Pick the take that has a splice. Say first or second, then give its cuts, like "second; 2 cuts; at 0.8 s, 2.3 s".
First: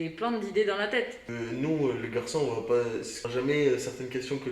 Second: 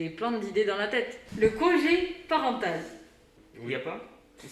first; 2 cuts; at 1.2 s, 3.3 s